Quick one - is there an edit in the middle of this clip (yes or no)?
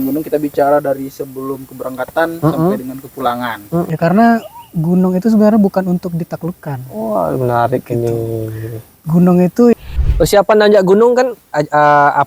yes